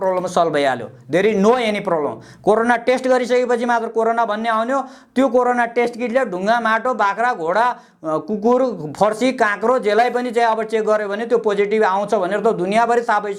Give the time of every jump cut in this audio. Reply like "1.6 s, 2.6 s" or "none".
none